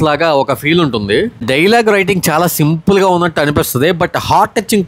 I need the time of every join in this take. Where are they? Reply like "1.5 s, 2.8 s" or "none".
1.4 s